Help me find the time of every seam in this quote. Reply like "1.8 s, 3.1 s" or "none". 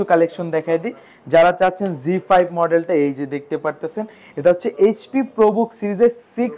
none

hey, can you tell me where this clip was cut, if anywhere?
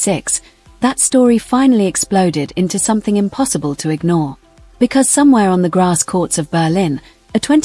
none

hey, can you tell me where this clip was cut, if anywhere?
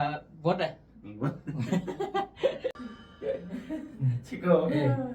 2.8 s

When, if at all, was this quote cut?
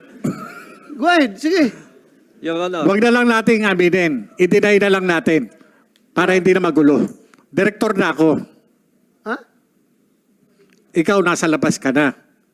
none

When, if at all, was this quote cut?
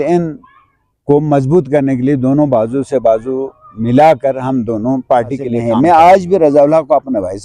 5.5 s

